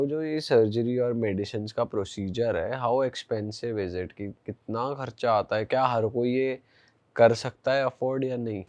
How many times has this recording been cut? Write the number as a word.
zero